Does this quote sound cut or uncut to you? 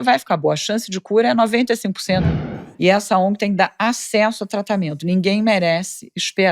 cut